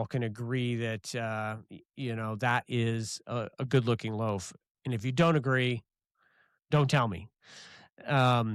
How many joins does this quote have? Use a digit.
0